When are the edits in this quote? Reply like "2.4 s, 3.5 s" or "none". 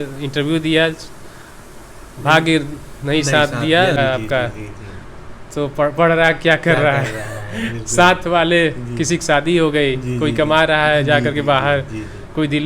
4.0 s